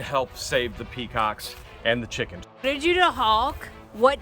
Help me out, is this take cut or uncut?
cut